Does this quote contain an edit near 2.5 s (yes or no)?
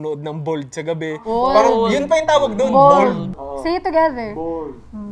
no